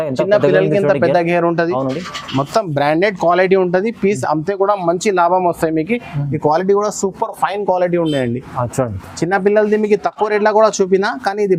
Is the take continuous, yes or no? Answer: yes